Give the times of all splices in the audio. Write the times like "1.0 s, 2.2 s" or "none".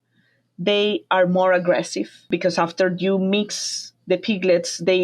2.3 s